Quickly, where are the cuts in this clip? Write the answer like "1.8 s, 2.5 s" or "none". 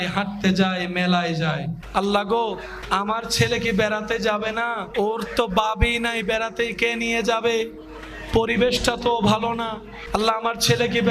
1.8 s, 2.7 s, 4.9 s, 9.9 s